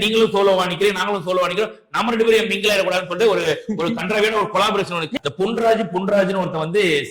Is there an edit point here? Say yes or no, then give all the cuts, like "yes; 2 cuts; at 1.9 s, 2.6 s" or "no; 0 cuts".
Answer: yes; 1 cut; at 5.1 s